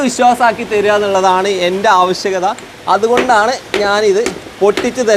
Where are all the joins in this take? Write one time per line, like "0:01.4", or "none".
none

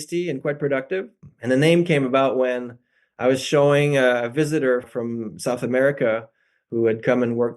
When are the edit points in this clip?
0:01.2
0:04.9

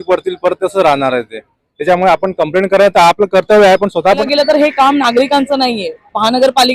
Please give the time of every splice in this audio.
0:04.3

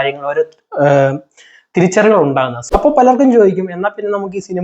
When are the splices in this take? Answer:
0:02.6

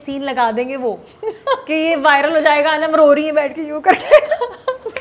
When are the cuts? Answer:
none

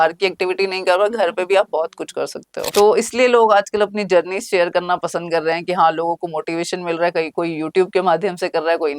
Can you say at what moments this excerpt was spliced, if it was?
0:02.7

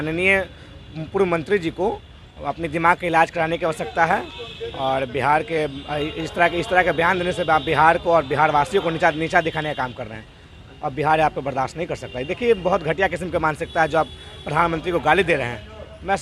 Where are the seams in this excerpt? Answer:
none

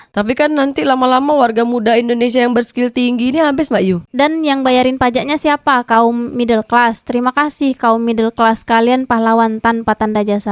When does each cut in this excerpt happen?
0:04.1

